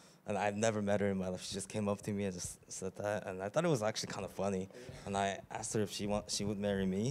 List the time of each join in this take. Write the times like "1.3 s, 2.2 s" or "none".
none